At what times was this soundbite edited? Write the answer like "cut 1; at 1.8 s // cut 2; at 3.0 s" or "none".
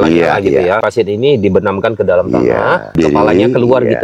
cut 1; at 0.9 s // cut 2; at 2.9 s